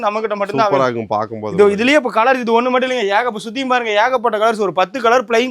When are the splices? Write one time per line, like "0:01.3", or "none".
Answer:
none